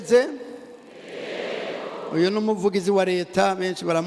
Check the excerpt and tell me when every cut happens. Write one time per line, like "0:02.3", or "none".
none